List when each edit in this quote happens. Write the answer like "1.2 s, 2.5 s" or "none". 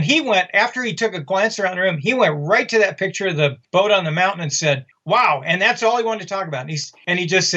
4.9 s